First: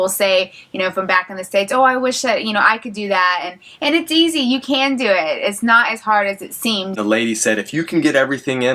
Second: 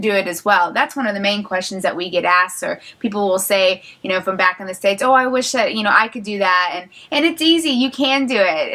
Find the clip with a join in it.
first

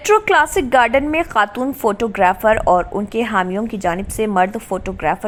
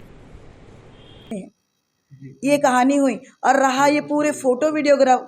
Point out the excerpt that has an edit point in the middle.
second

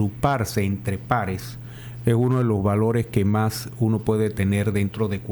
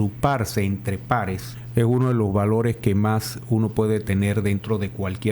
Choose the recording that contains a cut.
second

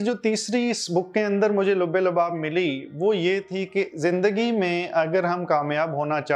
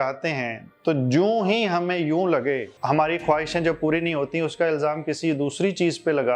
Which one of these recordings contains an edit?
second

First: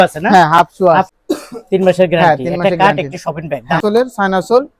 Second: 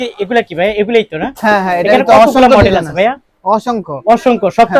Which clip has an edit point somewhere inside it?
first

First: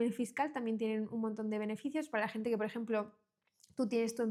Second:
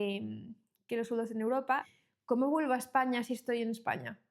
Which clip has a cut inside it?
second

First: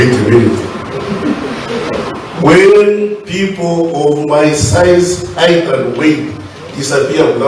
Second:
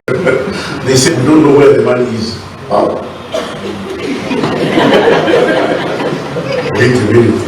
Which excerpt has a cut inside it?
second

